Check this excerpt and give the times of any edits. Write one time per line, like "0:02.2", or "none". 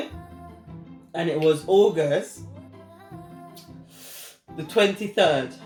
none